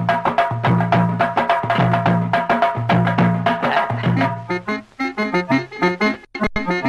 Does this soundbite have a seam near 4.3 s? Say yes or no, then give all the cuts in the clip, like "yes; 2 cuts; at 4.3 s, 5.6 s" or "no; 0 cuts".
yes; 1 cut; at 4.3 s